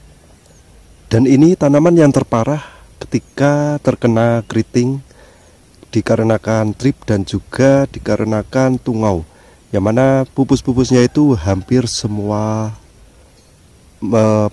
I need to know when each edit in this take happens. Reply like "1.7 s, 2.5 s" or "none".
none